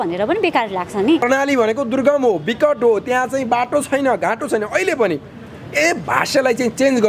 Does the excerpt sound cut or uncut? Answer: cut